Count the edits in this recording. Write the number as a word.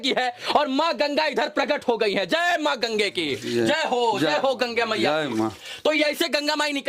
zero